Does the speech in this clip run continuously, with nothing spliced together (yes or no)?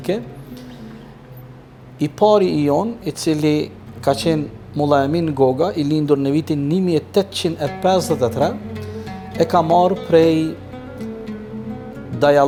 yes